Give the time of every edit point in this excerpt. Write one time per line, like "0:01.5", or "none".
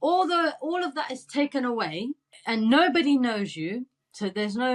0:02.3